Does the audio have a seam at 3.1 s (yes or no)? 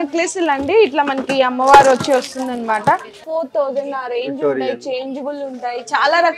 yes